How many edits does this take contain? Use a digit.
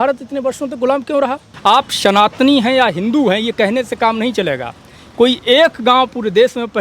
1